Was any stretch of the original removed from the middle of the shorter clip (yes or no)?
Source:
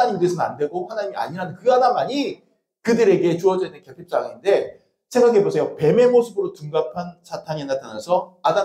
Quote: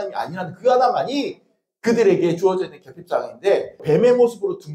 yes